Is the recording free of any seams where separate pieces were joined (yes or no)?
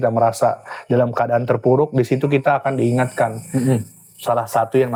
yes